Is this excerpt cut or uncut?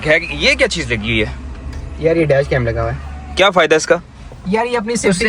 uncut